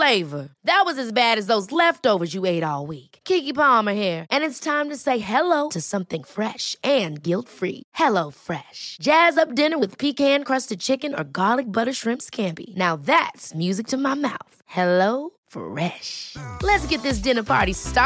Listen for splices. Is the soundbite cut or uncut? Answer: uncut